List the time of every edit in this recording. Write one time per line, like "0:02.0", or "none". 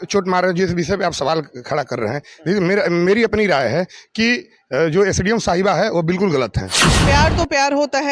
0:07.0

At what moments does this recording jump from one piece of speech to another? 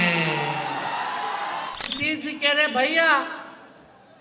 0:01.9

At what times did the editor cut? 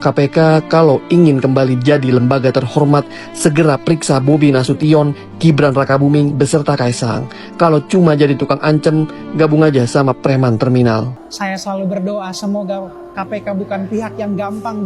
0:11.2

